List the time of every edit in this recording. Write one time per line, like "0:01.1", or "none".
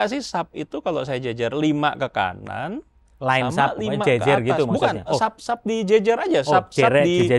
none